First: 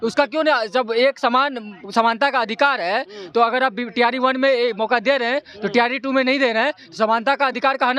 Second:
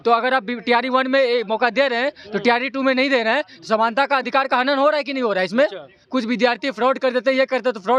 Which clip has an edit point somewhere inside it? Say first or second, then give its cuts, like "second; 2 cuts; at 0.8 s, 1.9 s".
second; 1 cut; at 5.9 s